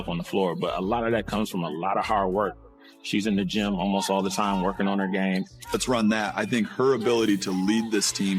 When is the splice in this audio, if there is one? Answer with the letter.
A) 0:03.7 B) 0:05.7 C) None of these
B